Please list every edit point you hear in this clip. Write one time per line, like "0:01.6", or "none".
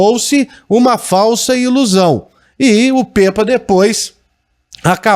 none